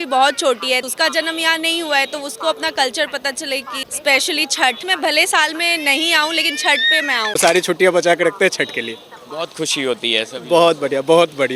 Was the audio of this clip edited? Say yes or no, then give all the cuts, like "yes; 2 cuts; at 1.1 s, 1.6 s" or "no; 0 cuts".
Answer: yes; 4 cuts; at 0.8 s, 3.8 s, 4.8 s, 7.4 s